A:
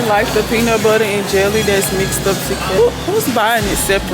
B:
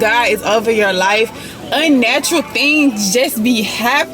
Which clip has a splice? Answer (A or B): A